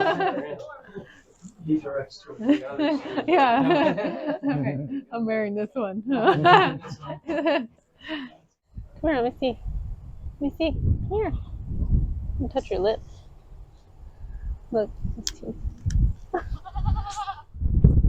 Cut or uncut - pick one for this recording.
cut